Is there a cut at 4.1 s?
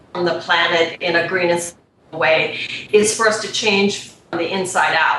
no; 0 cuts

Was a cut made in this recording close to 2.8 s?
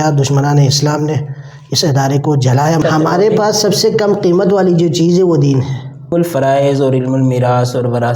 yes; 2 cuts; at 2.8 s, 6.1 s

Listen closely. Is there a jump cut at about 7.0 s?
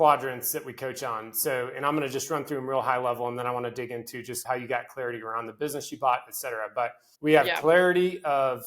yes; 2 cuts; at 4.4 s, 7.0 s

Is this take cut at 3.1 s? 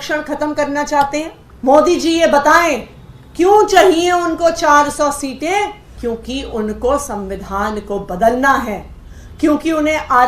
no; 2 cuts; at 1.4 s, 5.9 s

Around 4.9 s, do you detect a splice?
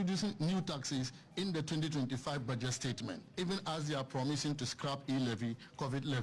no; 1 cut; at 3.2 s

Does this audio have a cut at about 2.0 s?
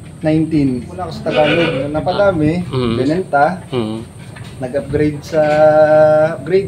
yes; 2 cuts; at 1.1 s, 2.0 s

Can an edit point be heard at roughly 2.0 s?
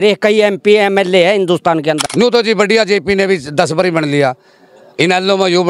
yes; 1 cut; at 2.0 s

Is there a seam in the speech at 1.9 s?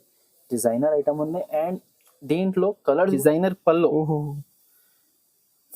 no; 1 cut; at 3.1 s

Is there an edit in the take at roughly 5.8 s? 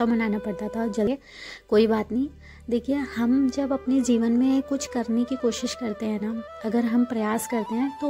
no; 1 cut; at 1.1 s

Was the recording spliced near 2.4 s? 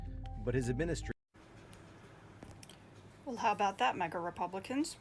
no; 1 cut; at 1.1 s

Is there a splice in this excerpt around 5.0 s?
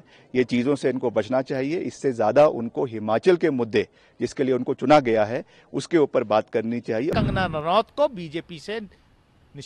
no; 1 cut; at 7.1 s

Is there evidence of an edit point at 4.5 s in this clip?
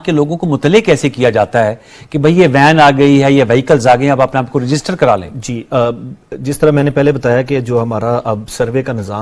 no; 0 cuts

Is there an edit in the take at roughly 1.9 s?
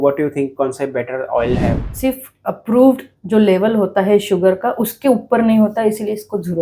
yes; 1 cut; at 1.9 s

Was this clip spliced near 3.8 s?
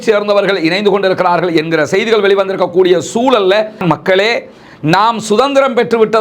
yes; 1 cut; at 3.8 s

